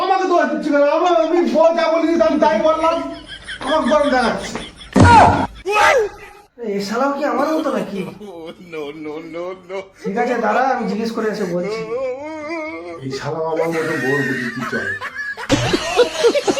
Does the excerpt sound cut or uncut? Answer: cut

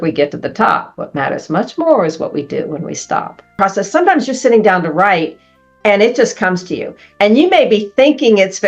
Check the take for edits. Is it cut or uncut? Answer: cut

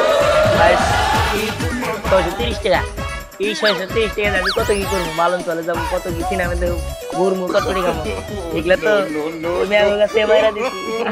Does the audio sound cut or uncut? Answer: uncut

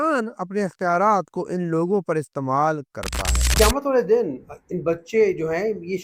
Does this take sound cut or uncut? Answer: cut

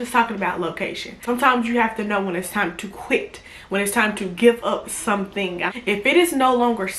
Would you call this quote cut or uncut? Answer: cut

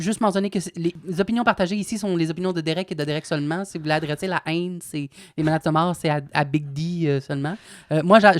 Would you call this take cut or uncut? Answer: cut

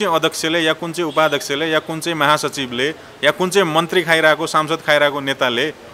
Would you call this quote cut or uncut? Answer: uncut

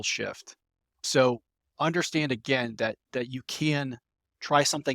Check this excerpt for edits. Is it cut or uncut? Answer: cut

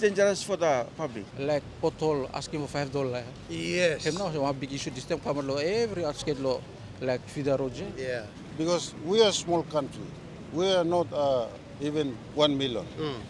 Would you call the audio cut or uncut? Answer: cut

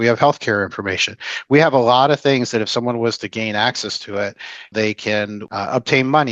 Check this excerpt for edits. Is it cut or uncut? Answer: cut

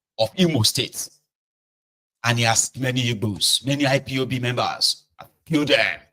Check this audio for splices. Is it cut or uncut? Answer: cut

